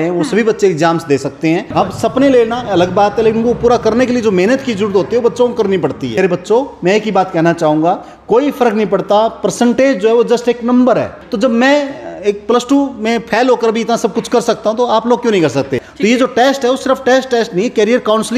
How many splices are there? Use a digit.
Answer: 4